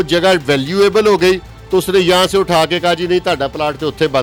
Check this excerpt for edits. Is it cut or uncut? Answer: uncut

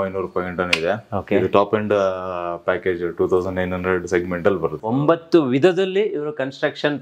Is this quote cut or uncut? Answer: cut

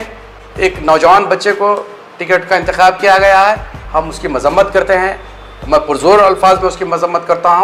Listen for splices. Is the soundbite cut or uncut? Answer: uncut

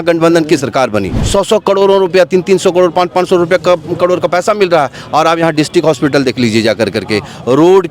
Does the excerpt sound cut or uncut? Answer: cut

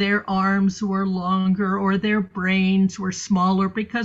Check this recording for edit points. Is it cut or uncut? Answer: uncut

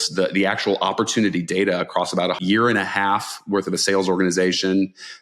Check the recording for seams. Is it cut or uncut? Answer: cut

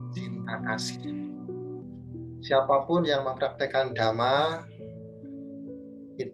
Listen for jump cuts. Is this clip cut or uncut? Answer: cut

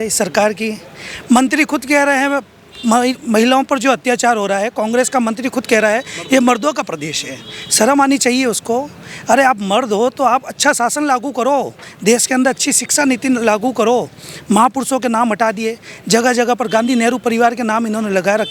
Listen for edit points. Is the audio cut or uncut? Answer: uncut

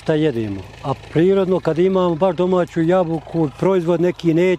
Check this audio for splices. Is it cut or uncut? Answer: uncut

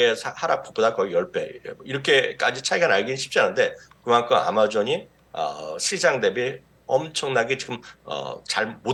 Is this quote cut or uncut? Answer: uncut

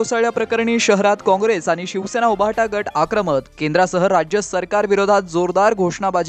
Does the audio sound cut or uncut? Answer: uncut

